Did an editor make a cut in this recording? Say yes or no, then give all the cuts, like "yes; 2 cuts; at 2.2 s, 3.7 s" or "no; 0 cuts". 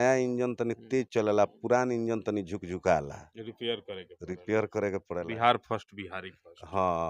no; 0 cuts